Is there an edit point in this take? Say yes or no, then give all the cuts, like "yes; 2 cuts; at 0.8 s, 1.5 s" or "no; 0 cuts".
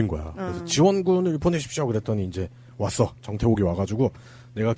no; 0 cuts